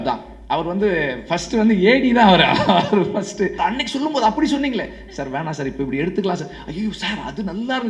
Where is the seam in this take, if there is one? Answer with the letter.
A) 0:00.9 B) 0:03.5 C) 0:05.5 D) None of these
B